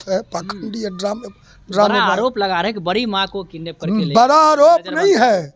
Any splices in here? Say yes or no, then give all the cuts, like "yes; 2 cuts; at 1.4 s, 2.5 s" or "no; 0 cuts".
no; 0 cuts